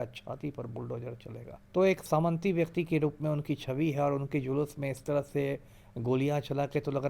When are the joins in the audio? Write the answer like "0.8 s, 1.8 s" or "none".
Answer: 1.5 s